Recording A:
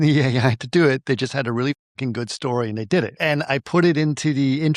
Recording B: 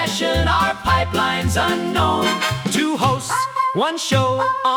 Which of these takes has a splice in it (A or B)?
A